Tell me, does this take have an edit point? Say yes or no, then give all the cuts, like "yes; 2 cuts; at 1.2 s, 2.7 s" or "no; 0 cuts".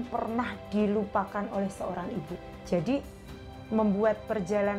yes; 1 cut; at 2.1 s